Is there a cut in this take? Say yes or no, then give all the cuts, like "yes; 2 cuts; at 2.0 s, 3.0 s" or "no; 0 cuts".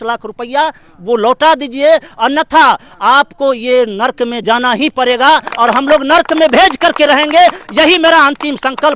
no; 0 cuts